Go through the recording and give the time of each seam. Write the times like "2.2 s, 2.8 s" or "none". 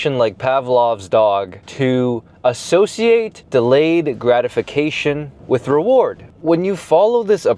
1.6 s, 3.4 s, 5.3 s, 6.3 s